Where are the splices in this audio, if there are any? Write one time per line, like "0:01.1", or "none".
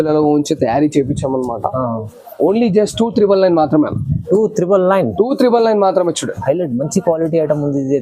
none